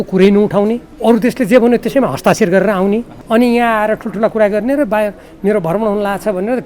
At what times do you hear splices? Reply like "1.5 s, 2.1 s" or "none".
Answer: 0.9 s, 3.1 s